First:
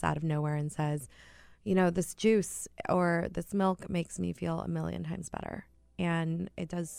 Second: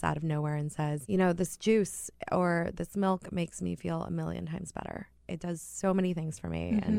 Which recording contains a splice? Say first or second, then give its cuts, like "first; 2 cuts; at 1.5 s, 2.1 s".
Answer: second; 2 cuts; at 1.0 s, 5.2 s